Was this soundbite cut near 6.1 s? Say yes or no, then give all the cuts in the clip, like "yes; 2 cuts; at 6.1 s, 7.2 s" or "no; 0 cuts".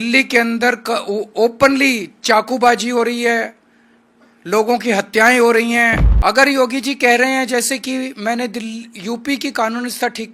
yes; 1 cut; at 6.1 s